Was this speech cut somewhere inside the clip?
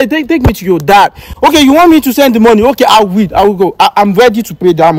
no; 0 cuts

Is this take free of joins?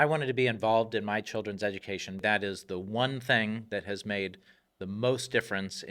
no; 1 cut; at 2.2 s

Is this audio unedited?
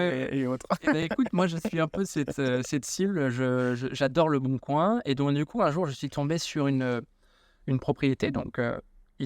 yes; 0 cuts

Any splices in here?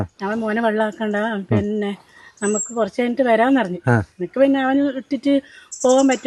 no; 0 cuts

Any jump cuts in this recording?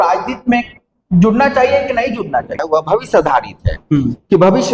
yes; 1 cut; at 2.6 s

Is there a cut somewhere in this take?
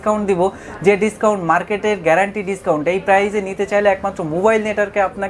no; 0 cuts

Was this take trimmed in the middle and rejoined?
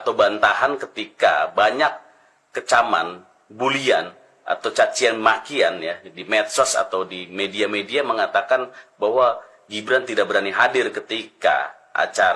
no; 0 cuts

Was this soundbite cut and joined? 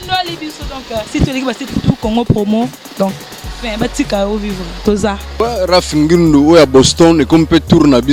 no; 0 cuts

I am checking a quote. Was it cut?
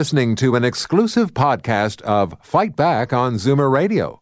no; 0 cuts

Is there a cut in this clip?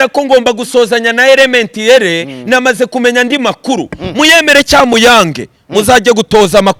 no; 0 cuts

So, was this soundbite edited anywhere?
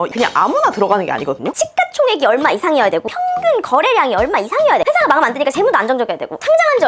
no; 0 cuts

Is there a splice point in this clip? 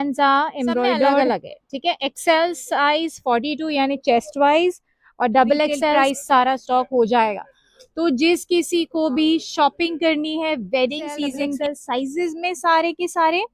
yes; 3 cuts; at 1.2 s, 6.0 s, 11.6 s

